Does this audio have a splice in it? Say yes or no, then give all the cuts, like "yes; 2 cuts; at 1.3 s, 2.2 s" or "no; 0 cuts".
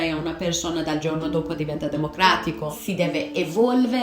yes; 1 cut; at 2.7 s